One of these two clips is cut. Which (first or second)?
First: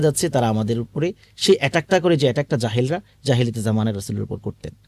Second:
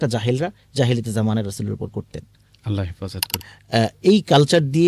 second